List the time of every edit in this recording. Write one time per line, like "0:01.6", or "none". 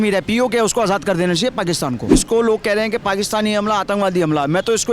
0:02.0